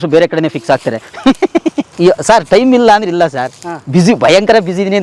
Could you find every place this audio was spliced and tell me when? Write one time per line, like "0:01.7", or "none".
0:01.9